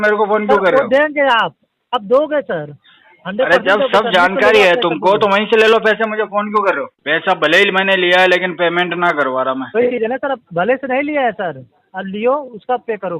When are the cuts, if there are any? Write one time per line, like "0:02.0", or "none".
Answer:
0:06.9